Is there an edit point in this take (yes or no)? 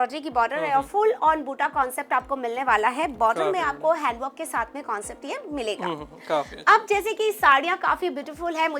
no